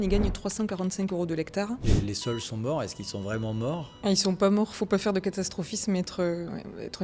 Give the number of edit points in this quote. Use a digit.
2